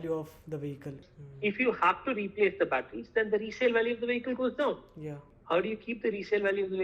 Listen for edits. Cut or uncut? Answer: cut